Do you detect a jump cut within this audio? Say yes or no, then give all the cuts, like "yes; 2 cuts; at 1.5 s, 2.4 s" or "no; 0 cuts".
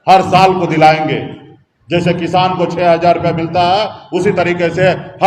no; 0 cuts